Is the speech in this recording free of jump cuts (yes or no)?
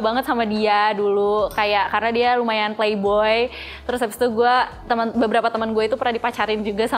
yes